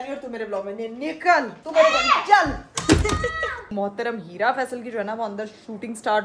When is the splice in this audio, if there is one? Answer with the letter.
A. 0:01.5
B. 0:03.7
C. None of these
B